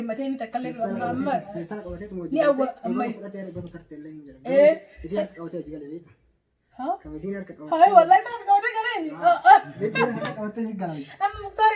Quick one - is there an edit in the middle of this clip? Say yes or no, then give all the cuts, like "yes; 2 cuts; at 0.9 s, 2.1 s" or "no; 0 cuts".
no; 0 cuts